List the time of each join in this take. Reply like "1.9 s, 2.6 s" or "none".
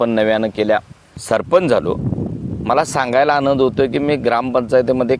1.1 s